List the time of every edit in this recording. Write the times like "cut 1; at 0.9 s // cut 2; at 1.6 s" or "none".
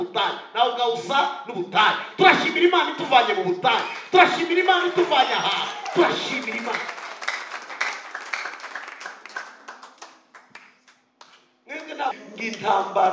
cut 1; at 12.1 s

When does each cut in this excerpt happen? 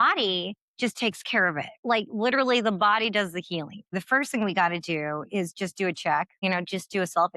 cut 1; at 1.8 s // cut 2; at 3.9 s // cut 3; at 6.3 s

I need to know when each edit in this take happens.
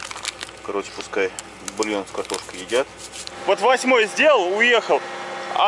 cut 1; at 3.3 s

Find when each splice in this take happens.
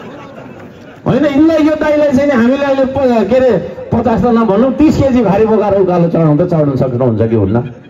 none

